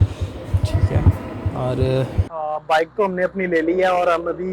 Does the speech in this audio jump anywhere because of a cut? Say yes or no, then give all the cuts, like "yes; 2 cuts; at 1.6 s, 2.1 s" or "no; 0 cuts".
yes; 1 cut; at 2.2 s